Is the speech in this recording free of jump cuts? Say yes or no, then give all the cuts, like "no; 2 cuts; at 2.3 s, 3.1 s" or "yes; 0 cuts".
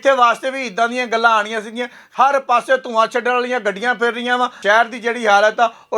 no; 2 cuts; at 2.0 s, 4.6 s